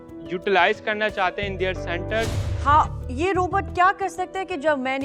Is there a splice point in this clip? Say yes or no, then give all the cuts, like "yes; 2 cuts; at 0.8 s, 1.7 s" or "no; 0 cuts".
yes; 1 cut; at 2.4 s